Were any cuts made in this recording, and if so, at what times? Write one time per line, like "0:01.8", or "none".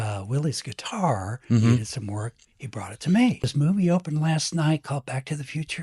0:03.5